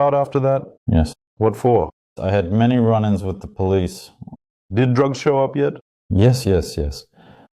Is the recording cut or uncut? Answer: cut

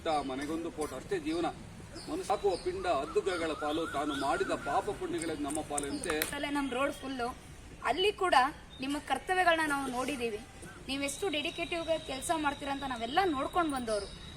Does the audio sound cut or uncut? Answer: cut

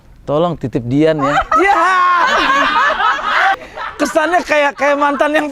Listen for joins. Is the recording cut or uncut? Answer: cut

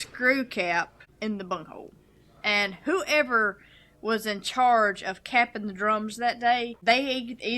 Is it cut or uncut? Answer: cut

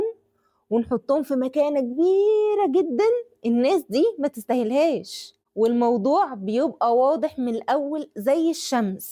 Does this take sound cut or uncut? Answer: cut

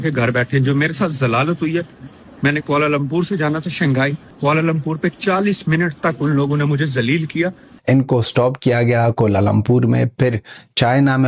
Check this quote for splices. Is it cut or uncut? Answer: cut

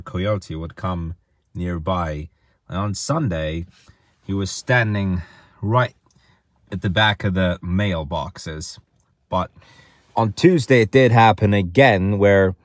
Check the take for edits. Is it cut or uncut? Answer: uncut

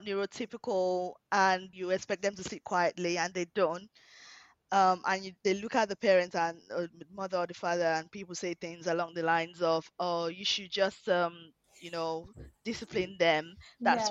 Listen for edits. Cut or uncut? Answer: cut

